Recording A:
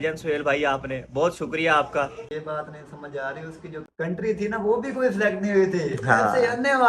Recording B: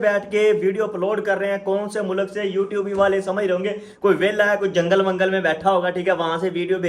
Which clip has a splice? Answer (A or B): A